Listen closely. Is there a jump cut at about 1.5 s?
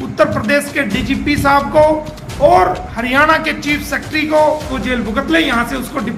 no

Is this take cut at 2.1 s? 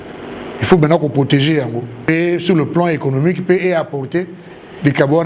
yes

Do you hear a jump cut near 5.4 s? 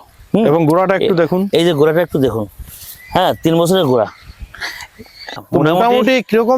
yes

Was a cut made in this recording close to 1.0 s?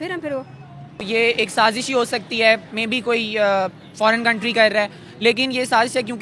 yes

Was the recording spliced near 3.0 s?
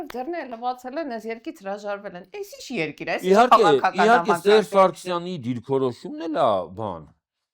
no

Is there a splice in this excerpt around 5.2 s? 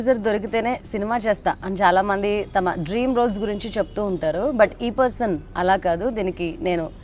no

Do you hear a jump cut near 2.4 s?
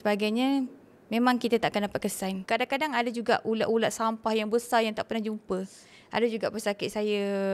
yes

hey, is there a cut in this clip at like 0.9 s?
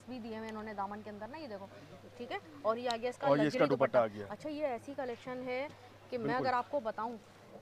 no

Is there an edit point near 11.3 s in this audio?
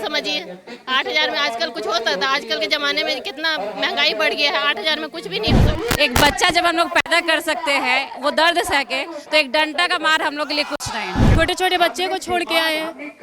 yes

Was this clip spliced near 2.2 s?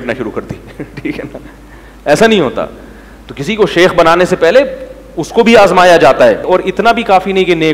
no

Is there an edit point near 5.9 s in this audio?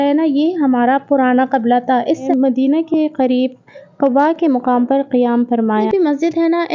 yes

